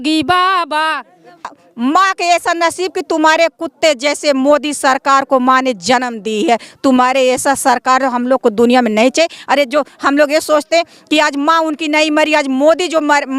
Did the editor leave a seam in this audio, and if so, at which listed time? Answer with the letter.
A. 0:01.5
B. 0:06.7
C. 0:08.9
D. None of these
A